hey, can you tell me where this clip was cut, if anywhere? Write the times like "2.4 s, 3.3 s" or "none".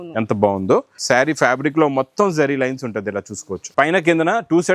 0.9 s, 3.6 s